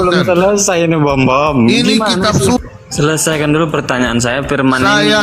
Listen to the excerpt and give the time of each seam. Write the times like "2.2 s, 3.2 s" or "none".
2.6 s